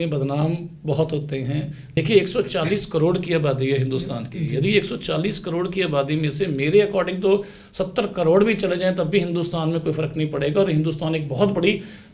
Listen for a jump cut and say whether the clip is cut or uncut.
cut